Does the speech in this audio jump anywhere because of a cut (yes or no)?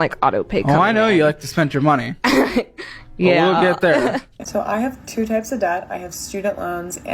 yes